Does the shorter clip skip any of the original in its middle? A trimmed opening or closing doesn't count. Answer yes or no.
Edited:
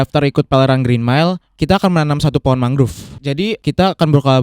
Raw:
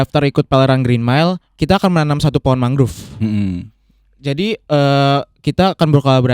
yes